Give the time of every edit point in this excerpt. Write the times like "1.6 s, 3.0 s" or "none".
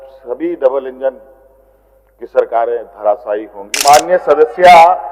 3.7 s